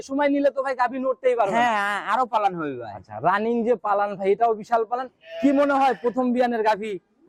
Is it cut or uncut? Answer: uncut